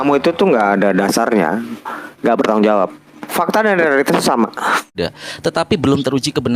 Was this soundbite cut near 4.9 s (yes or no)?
yes